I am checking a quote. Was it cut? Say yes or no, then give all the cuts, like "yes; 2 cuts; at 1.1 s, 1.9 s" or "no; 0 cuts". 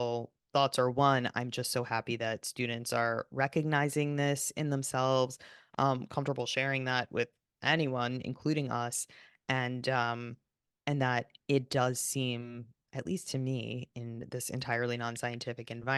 no; 0 cuts